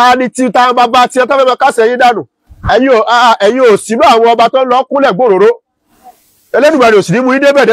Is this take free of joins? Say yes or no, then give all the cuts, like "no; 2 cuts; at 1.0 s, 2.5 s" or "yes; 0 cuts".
no; 1 cut; at 2.3 s